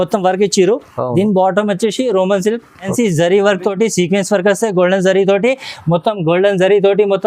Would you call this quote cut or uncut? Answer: cut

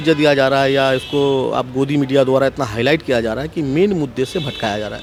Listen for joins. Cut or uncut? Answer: uncut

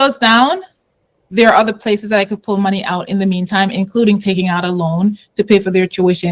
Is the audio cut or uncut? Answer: uncut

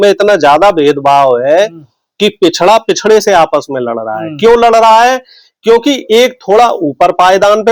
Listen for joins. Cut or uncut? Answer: uncut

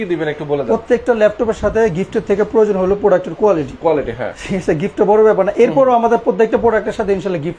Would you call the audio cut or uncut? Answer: uncut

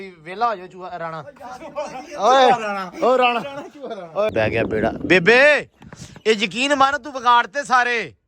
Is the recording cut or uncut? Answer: cut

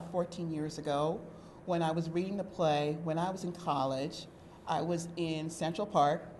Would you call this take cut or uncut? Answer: uncut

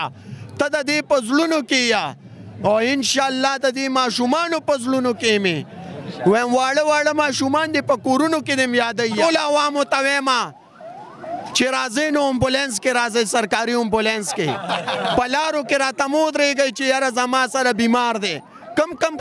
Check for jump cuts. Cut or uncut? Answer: cut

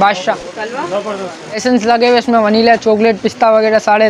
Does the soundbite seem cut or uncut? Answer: cut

